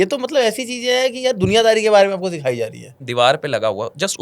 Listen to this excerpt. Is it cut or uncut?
cut